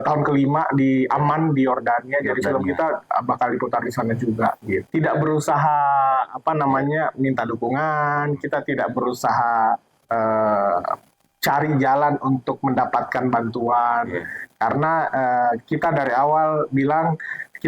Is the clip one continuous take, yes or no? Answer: no